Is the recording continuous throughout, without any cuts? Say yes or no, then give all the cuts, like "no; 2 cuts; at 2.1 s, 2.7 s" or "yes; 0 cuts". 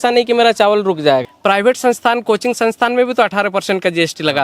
no; 1 cut; at 1.3 s